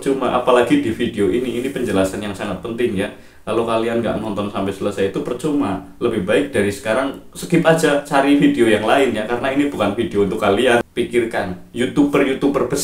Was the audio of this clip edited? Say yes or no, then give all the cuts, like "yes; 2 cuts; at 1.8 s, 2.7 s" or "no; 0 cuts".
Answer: yes; 1 cut; at 10.9 s